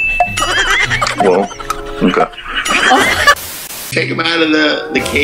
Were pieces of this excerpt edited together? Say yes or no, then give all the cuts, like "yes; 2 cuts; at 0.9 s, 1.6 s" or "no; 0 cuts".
yes; 1 cut; at 3.9 s